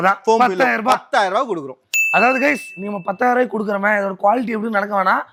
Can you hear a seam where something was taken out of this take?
no; 0 cuts

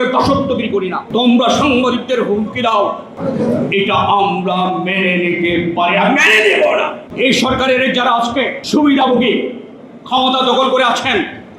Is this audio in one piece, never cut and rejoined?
no; 4 cuts; at 1.0 s, 3.1 s, 7.0 s, 8.6 s

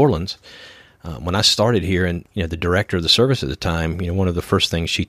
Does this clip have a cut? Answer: yes; 1 cut; at 2.2 s

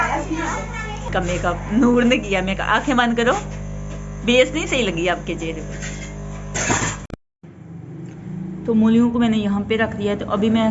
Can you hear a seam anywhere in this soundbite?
yes; 2 cuts; at 1.1 s, 7.0 s

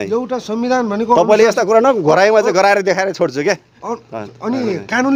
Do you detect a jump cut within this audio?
no; 0 cuts

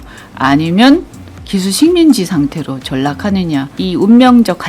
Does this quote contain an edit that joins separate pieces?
yes; 1 cut; at 3.7 s

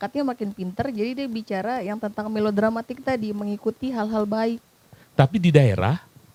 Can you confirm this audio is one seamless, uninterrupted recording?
yes; 0 cuts

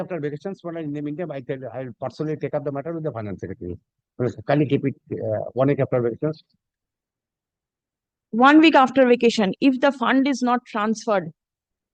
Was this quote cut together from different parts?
no; 0 cuts

